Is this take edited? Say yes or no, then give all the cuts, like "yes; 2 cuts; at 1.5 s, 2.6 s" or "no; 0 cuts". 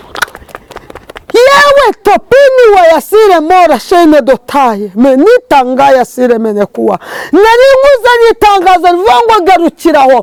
no; 0 cuts